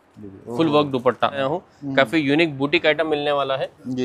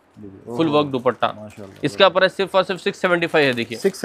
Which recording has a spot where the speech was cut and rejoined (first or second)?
first